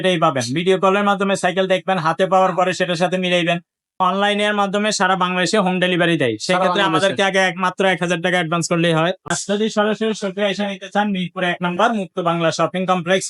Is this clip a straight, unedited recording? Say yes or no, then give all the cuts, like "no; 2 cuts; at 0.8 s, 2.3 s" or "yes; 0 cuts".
no; 2 cuts; at 3.9 s, 9.3 s